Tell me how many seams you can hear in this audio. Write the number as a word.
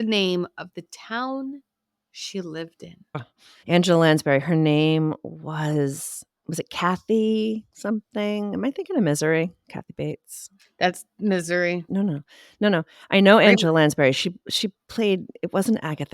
two